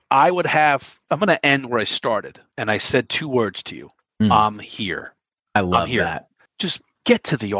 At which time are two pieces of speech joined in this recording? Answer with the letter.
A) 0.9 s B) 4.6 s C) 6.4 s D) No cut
A